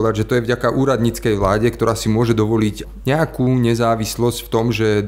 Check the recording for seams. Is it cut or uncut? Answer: cut